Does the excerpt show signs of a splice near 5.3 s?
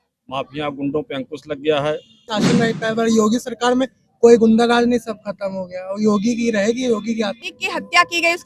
no; 2 cuts; at 2.4 s, 7.4 s

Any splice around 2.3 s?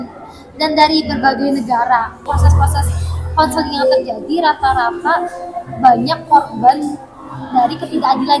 yes; 1 cut; at 2.3 s

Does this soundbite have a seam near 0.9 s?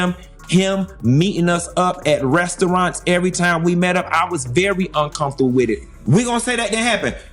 no; 1 cut; at 5.9 s

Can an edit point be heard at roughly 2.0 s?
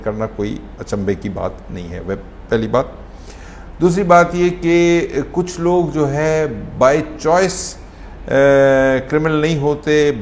no; 0 cuts

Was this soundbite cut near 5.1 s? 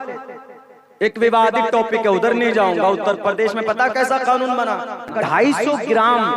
yes; 1 cut; at 5.1 s

